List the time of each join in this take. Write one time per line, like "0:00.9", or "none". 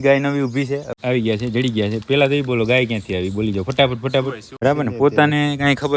0:00.9
0:04.6